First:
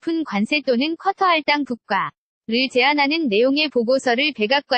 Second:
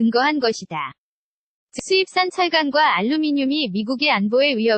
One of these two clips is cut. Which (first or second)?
second